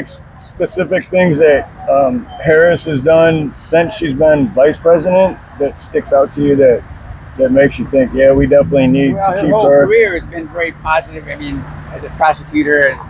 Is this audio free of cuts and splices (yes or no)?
yes